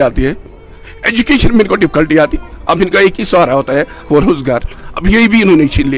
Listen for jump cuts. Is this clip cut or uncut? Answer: uncut